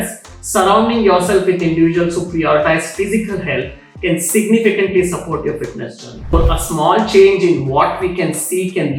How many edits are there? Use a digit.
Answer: 1